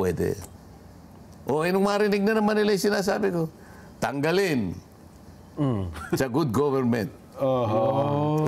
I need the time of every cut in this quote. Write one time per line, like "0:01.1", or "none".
none